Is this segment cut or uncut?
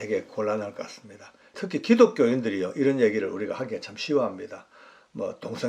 cut